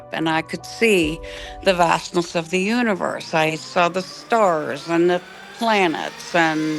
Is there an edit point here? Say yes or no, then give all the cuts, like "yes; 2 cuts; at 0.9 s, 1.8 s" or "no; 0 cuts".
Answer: no; 0 cuts